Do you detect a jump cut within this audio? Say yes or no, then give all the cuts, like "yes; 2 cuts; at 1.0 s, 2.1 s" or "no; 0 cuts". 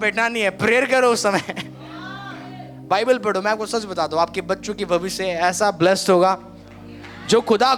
no; 0 cuts